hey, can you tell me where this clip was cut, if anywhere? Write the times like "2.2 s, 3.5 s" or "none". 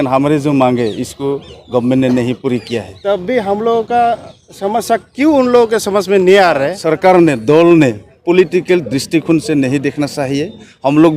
2.9 s, 6.8 s